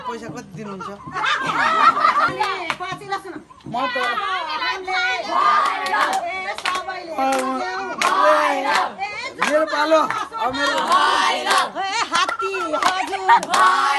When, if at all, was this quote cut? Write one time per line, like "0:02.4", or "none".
0:02.3